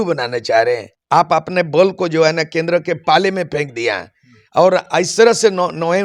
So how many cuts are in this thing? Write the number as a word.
one